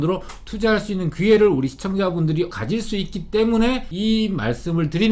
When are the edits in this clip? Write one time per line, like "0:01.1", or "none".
0:02.5
0:03.9